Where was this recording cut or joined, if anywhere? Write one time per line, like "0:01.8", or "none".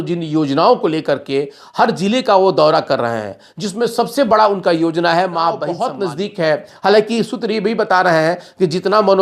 0:05.9